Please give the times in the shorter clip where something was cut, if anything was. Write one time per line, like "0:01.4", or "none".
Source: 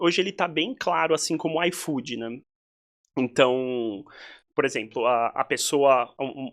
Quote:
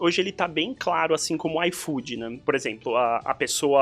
0:02.3